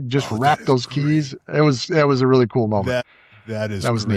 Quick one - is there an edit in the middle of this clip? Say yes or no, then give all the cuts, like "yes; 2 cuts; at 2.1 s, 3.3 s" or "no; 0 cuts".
yes; 1 cut; at 3.0 s